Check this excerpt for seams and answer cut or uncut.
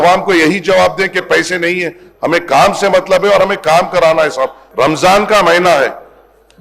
cut